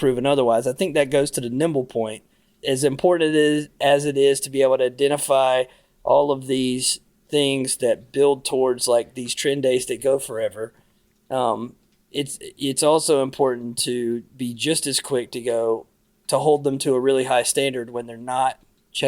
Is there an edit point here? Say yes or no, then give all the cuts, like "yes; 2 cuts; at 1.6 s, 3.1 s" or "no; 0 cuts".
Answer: yes; 1 cut; at 2.5 s